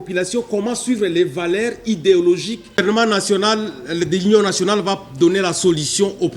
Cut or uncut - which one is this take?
cut